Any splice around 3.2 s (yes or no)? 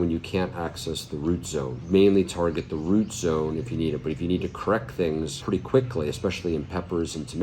no